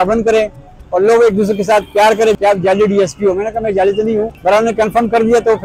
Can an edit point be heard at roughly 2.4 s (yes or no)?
yes